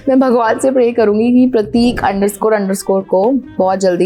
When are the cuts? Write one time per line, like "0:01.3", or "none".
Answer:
none

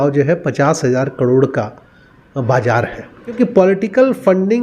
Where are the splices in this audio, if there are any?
0:03.3

